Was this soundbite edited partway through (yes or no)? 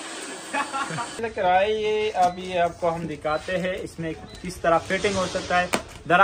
yes